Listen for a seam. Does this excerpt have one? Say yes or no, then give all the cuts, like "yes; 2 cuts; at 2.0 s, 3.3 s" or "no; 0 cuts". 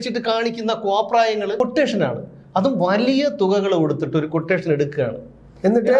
yes; 1 cut; at 1.6 s